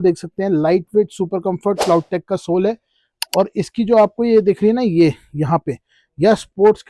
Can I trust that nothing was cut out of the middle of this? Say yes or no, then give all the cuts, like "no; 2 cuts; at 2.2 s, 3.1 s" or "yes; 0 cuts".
yes; 0 cuts